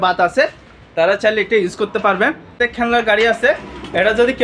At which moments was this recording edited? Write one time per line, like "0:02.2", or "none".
0:02.5